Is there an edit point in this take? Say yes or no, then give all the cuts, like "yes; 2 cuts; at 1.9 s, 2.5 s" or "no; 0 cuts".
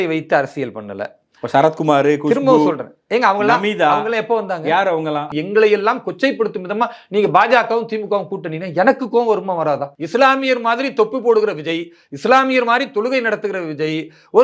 yes; 2 cuts; at 5.3 s, 9.9 s